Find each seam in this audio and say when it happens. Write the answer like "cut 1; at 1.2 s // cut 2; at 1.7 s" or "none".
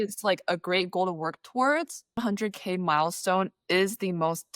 cut 1; at 2.2 s

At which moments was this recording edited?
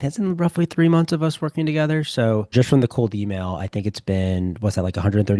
cut 1; at 2.5 s

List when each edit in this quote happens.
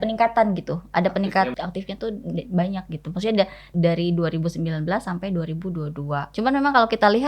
cut 1; at 1.5 s // cut 2; at 3.6 s // cut 3; at 6.3 s

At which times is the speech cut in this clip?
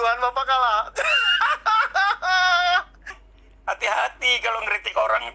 cut 1; at 3.2 s

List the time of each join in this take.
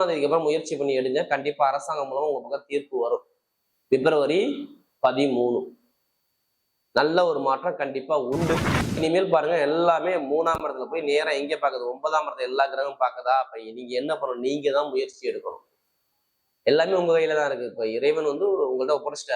cut 1; at 9.0 s

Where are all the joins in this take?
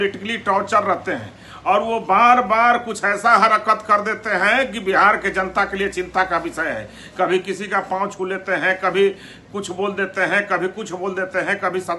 none

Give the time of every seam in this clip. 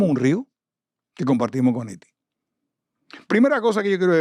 none

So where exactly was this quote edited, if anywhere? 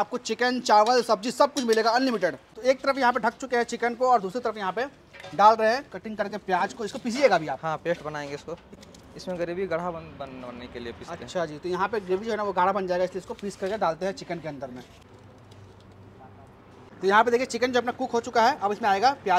none

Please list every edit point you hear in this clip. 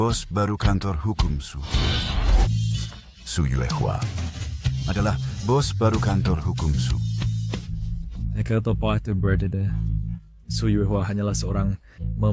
cut 1; at 2.5 s

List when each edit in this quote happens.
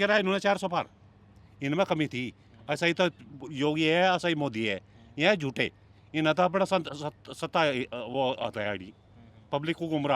none

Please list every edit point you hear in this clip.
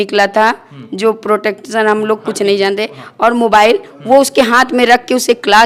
none

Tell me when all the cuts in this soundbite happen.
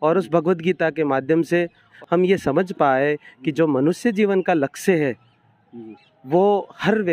cut 1; at 1.9 s

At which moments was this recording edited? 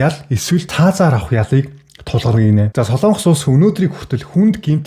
none

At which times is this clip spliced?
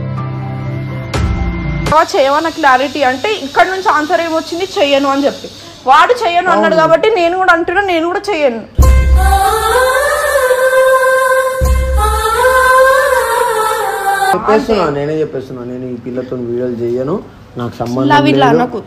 cut 1; at 1.9 s // cut 2; at 14.4 s

